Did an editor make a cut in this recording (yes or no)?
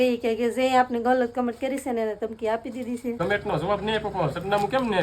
yes